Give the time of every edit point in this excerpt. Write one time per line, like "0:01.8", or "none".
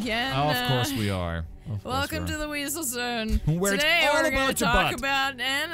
none